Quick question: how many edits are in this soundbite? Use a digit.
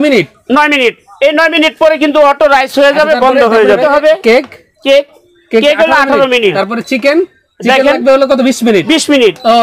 3